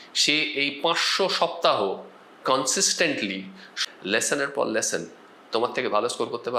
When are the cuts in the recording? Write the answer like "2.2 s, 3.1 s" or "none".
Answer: 3.7 s

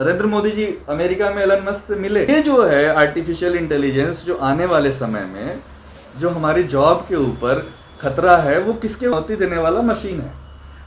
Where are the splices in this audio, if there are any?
2.3 s, 9.1 s

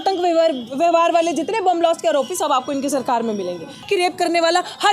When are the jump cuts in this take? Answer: 3.8 s

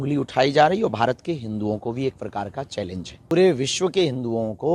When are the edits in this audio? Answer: 3.3 s

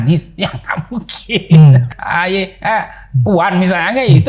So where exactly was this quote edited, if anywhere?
1.9 s

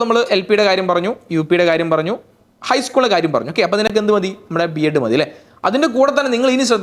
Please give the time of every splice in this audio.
none

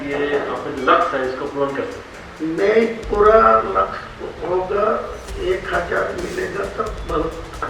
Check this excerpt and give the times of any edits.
none

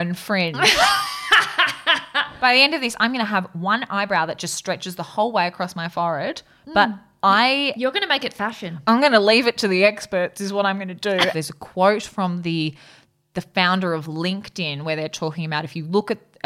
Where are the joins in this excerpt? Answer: 2.4 s, 11.3 s

